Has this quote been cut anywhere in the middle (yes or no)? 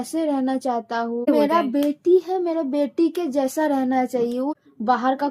yes